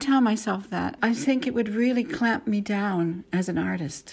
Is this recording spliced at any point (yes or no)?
yes